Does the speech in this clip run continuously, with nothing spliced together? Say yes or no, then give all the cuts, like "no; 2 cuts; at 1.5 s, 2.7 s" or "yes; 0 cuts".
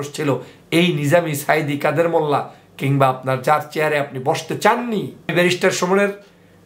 no; 1 cut; at 5.3 s